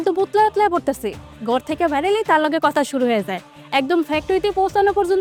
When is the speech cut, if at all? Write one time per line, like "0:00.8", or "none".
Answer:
none

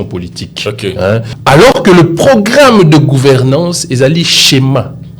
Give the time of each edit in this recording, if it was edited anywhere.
0:01.3

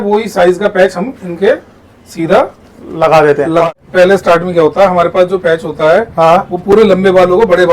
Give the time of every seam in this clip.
0:03.7

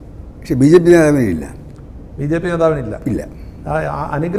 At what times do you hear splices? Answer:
none

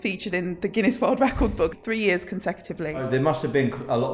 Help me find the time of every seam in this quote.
0:01.8
0:03.1

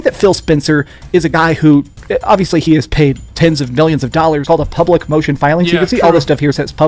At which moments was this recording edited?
0:04.4

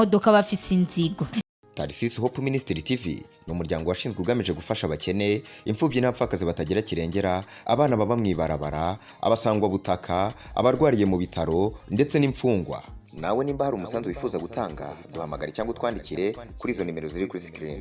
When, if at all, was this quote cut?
0:01.4

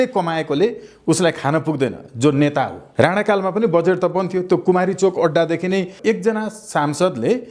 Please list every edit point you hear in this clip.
0:02.8
0:05.9

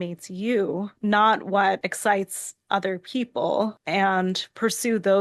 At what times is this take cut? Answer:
0:00.9
0:01.9
0:03.8

